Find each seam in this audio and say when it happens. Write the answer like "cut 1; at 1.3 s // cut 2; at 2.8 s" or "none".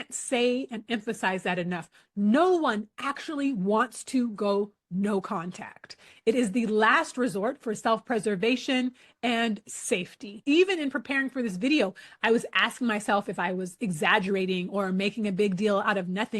cut 1; at 10.4 s